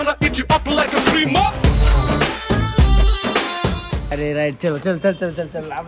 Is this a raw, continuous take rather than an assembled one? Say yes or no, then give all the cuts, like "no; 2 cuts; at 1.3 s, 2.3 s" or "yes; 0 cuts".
no; 1 cut; at 4.1 s